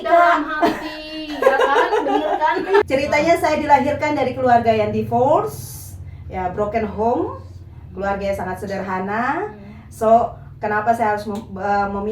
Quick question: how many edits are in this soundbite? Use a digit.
1